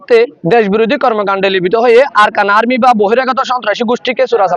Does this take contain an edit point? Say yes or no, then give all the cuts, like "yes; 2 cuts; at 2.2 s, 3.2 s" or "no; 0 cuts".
no; 0 cuts